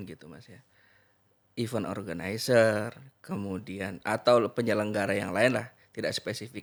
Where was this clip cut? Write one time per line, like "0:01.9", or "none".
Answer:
none